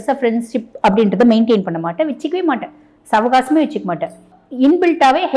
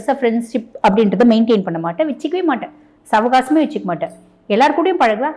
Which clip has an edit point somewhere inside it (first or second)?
first